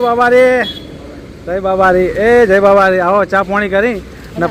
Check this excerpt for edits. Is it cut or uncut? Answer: uncut